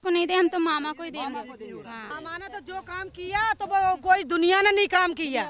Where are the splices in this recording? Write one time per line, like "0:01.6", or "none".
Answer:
0:02.1